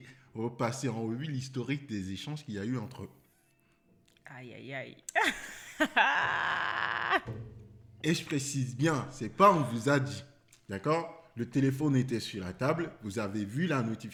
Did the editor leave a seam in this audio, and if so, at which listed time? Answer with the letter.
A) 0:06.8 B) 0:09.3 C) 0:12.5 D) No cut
D